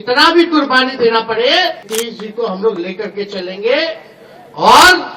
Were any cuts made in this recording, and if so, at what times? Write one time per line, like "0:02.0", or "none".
0:01.8

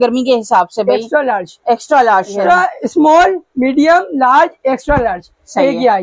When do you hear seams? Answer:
0:02.3

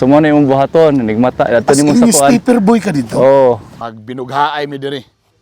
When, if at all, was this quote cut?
0:03.8

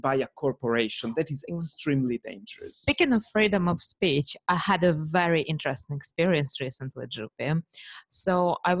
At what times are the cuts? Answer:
none

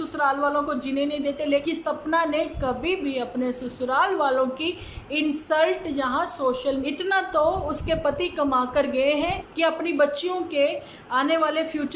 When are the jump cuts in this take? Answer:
0:01.6
0:06.8
0:09.5

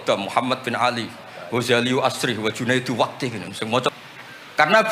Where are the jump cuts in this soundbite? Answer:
0:03.9

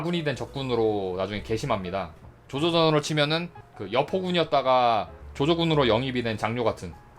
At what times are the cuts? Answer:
0:02.3

